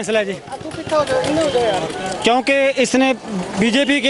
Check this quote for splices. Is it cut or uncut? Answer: uncut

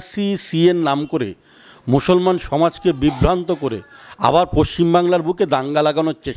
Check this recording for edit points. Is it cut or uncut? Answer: uncut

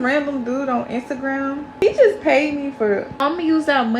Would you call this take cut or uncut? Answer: cut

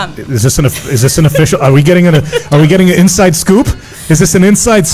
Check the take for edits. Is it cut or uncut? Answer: uncut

